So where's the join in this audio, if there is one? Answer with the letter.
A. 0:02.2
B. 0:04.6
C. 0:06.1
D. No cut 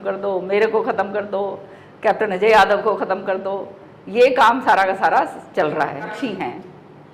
C